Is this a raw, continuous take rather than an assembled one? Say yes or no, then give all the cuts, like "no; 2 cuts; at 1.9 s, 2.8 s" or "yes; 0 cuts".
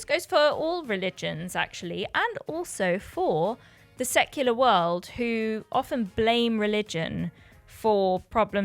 yes; 0 cuts